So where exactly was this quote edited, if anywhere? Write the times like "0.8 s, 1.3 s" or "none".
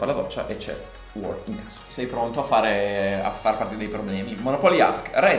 1.0 s, 1.8 s